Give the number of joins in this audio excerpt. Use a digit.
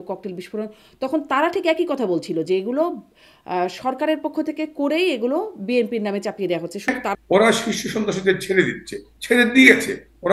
1